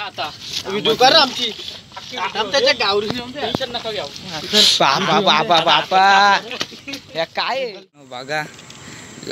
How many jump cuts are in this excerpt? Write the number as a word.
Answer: one